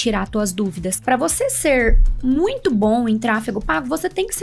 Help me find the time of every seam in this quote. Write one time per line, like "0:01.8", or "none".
0:01.0